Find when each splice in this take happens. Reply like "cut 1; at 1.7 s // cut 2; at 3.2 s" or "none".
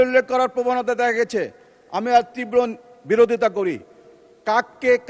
none